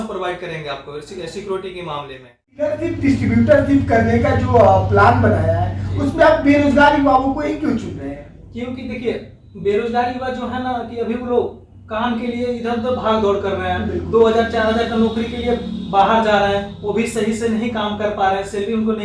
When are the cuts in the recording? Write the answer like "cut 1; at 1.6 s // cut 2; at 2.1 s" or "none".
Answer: cut 1; at 2.7 s